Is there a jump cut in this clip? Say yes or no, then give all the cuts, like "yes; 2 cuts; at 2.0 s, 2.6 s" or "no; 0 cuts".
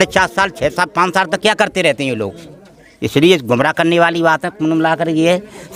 no; 0 cuts